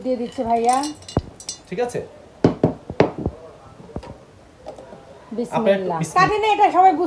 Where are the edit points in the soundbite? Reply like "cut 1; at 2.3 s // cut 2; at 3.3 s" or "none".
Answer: cut 1; at 6.0 s